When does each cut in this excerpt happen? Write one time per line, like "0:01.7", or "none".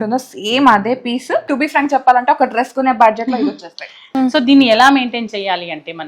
0:01.5
0:04.1